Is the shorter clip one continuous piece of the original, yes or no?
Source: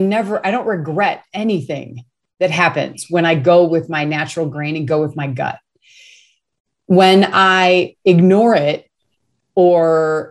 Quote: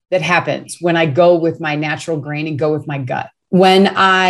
no